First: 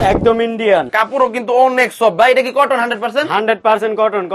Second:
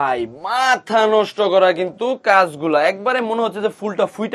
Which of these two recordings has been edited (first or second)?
first